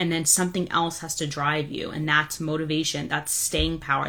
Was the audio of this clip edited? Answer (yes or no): no